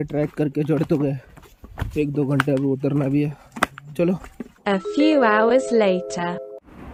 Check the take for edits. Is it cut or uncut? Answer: uncut